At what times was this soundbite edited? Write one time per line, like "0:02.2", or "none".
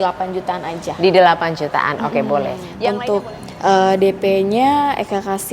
0:02.7